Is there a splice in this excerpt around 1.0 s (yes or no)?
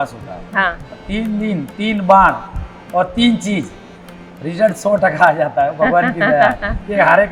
yes